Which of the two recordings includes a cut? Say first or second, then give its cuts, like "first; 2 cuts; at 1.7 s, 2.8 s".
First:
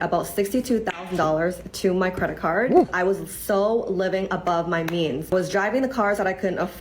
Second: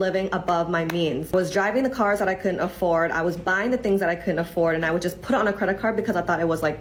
first; 1 cut; at 2.8 s